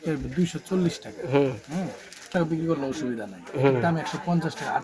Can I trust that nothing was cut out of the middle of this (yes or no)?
no